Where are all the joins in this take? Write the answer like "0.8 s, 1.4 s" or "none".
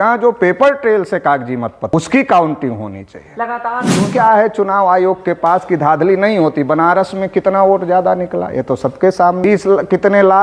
1.9 s, 4.1 s, 9.4 s